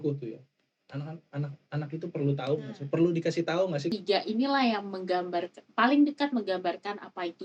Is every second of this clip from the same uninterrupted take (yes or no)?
no